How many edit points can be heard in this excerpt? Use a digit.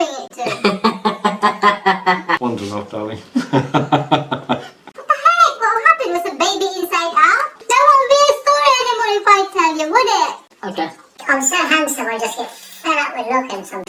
4